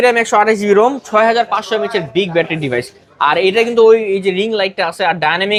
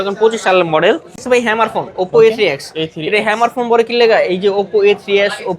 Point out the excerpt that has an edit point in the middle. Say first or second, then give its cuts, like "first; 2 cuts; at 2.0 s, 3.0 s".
second; 1 cut; at 1.2 s